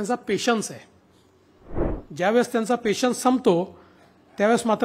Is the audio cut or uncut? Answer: cut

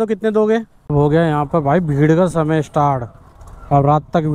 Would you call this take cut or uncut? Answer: cut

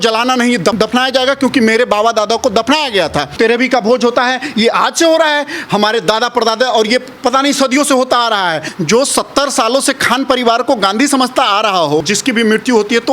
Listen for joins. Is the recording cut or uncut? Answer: cut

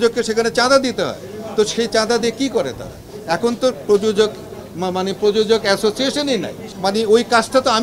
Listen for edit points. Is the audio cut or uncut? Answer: uncut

